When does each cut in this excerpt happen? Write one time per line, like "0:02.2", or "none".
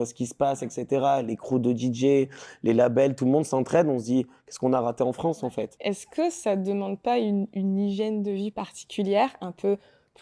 0:05.7

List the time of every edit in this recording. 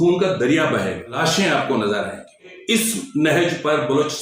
0:01.2
0:02.5

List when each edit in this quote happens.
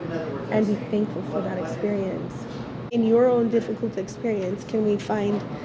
0:03.0

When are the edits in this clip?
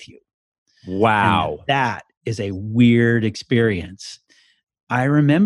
0:04.2

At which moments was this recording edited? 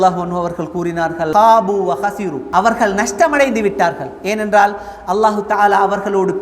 0:01.3
0:02.4

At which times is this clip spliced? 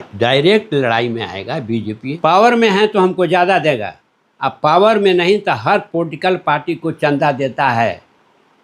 0:02.2

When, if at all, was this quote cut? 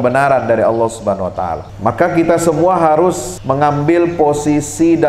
0:01.7
0:03.3

